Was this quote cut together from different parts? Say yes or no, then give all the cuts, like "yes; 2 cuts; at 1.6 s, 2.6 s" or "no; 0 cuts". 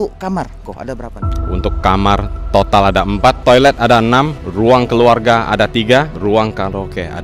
yes; 3 cuts; at 3.4 s, 4.4 s, 6.1 s